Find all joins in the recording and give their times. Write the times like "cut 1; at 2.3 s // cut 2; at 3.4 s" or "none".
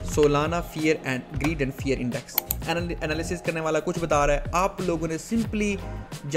cut 1; at 2.5 s